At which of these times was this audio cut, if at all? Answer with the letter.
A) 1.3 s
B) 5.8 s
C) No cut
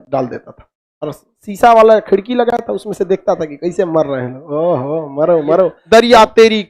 B